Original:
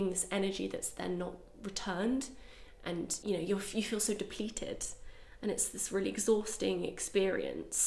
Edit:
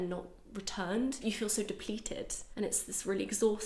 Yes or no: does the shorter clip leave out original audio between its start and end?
yes